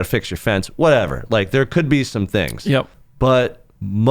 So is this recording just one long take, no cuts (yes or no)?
no